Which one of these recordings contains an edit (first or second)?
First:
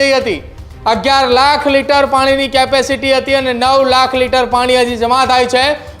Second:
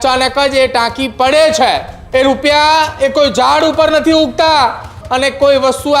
second